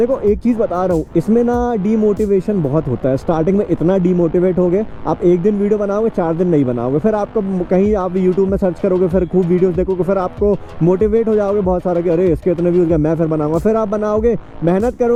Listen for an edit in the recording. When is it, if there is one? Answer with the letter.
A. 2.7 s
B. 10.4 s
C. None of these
C